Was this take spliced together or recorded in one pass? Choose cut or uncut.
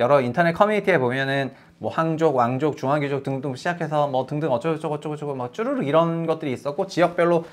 uncut